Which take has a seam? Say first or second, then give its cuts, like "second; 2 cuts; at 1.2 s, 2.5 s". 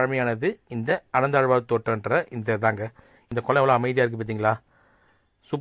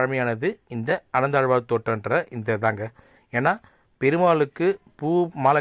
first; 1 cut; at 3.2 s